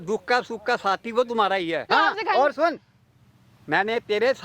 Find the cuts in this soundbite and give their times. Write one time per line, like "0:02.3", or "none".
0:01.9